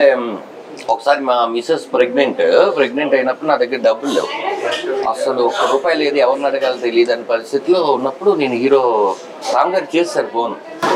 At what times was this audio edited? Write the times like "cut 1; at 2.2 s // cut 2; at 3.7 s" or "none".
none